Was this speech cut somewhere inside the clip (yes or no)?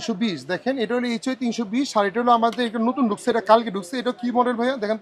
no